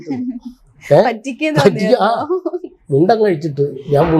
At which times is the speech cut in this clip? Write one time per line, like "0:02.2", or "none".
none